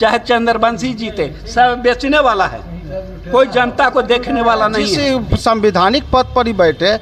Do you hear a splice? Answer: yes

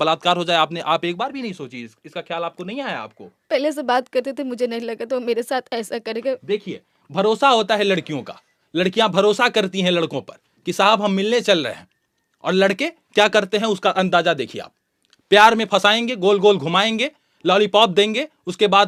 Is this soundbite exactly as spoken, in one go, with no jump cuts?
yes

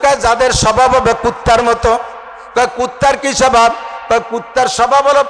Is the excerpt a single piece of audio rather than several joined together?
yes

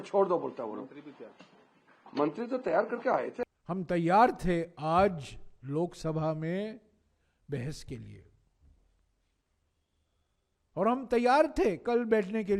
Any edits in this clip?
yes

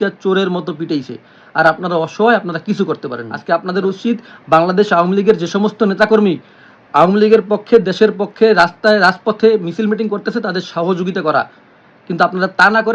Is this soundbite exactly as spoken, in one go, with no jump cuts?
no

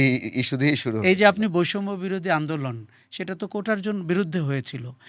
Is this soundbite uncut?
yes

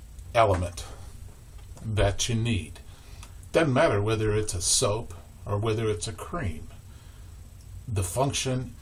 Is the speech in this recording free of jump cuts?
yes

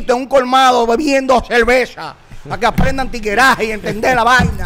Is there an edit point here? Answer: no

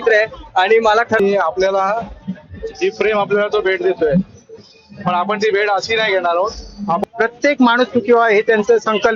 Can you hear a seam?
yes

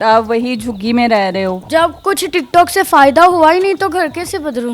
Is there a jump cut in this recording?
yes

